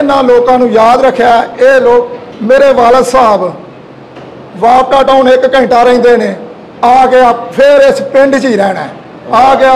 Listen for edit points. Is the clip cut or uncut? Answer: uncut